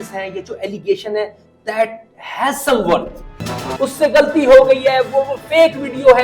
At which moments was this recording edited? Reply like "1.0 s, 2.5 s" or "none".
3.7 s